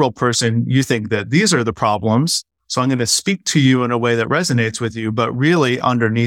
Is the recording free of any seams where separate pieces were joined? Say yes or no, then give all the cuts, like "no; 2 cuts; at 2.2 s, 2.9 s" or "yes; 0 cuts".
yes; 0 cuts